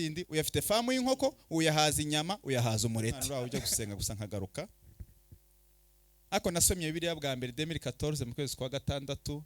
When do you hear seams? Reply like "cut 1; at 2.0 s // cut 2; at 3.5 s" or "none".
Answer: cut 1; at 3.2 s